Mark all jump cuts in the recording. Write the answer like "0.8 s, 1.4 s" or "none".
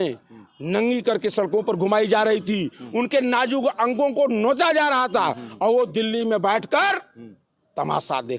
none